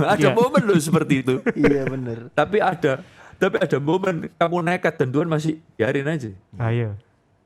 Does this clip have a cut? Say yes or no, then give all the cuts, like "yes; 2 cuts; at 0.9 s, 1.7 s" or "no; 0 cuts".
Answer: no; 0 cuts